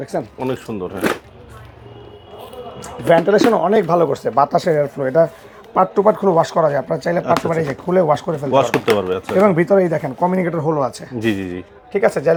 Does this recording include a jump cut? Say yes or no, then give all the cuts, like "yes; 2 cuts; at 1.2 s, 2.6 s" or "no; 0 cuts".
no; 0 cuts